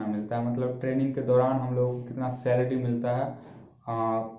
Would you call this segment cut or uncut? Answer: uncut